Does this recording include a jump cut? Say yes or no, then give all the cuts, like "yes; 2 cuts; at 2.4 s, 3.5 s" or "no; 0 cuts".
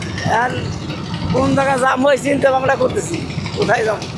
no; 0 cuts